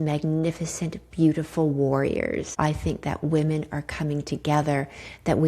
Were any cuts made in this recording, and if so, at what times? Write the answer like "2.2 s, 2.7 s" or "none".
2.5 s